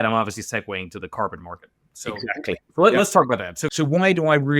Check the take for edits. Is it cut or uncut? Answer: cut